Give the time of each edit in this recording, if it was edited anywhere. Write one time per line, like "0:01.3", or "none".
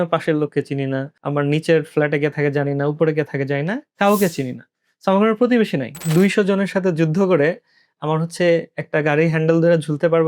0:01.1
0:06.0